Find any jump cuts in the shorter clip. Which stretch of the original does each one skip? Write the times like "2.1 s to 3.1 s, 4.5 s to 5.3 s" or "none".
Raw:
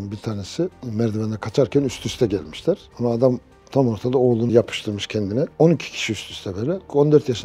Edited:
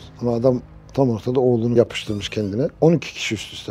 none